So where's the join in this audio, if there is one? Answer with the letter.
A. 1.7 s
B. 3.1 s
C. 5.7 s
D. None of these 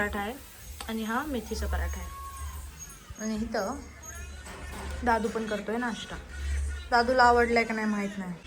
D